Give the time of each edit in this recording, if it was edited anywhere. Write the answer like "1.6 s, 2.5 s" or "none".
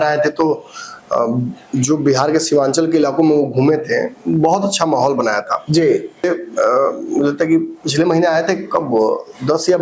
6.2 s

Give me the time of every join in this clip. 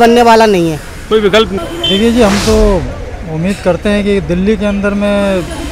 1.6 s

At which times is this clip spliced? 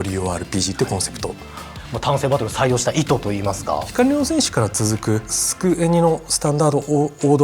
1.8 s, 3.9 s, 5.4 s

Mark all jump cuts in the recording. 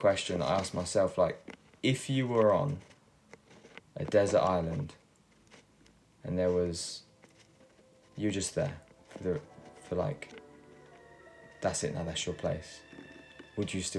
none

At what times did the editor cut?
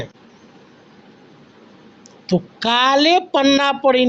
none

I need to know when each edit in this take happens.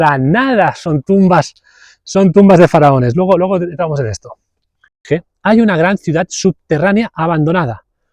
5.1 s

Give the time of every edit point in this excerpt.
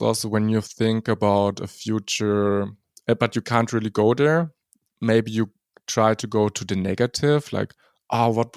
none

